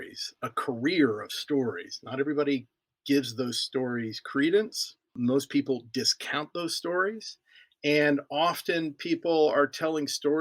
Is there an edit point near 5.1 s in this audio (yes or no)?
yes